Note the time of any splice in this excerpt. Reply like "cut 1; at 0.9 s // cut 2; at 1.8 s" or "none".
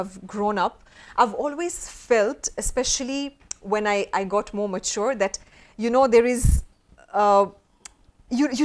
none